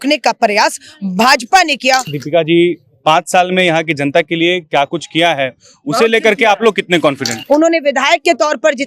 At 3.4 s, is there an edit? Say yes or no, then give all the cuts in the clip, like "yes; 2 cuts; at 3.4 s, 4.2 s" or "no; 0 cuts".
no; 2 cuts; at 2.1 s, 7.3 s